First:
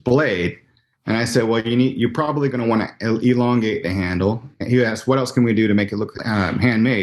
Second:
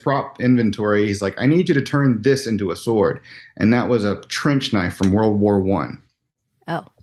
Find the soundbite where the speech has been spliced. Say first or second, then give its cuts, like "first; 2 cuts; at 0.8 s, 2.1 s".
first; 1 cut; at 6.1 s